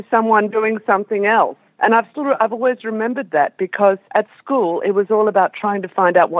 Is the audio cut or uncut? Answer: cut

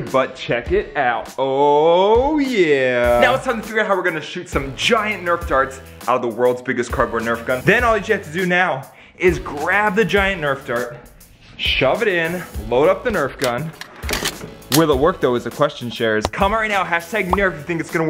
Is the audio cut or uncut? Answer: cut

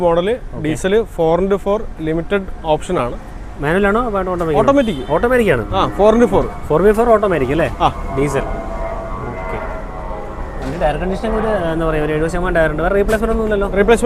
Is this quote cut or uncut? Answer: uncut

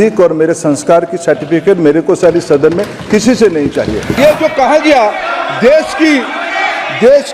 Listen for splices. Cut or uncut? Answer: cut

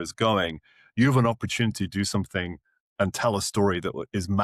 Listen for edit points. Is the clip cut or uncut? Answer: uncut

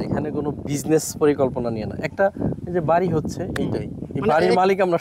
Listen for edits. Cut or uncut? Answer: uncut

